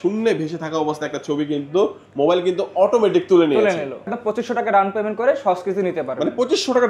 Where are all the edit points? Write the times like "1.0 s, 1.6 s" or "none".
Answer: 4.1 s